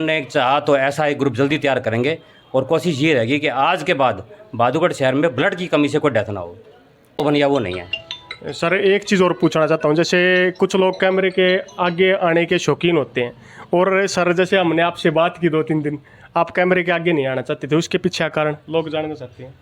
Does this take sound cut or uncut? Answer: cut